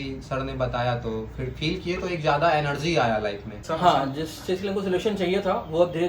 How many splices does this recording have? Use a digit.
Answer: 1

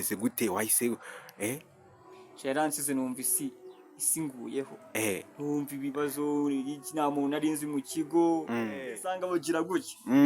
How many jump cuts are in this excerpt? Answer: 1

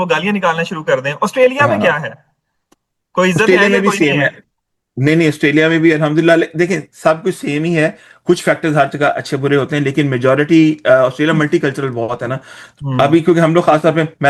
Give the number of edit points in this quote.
0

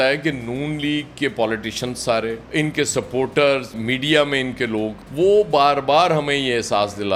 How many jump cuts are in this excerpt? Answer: 0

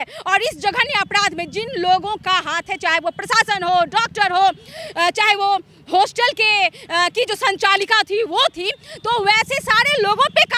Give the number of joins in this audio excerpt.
0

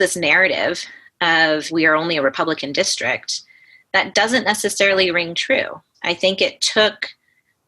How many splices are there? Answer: 2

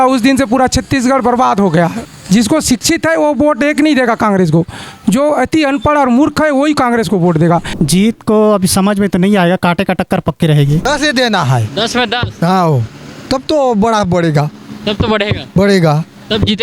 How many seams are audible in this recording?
3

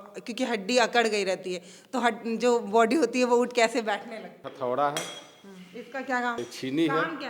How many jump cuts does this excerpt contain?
2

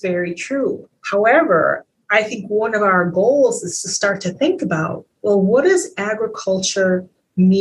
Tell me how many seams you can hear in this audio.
2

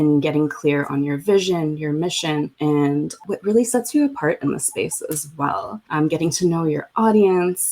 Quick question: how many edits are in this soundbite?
2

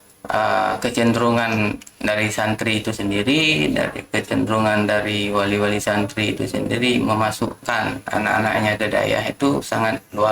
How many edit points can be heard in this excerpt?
0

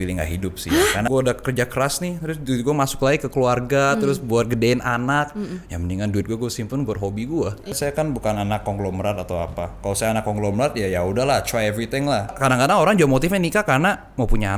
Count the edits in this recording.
3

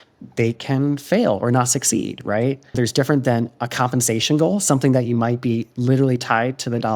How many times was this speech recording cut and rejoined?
1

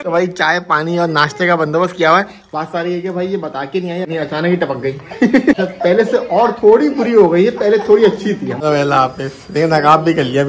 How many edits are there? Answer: 3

